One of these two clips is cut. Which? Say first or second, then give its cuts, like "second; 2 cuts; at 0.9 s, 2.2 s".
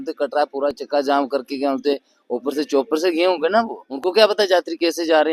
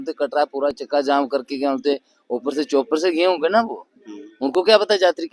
first; 1 cut; at 3.8 s